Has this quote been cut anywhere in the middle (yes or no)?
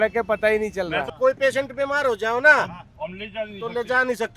yes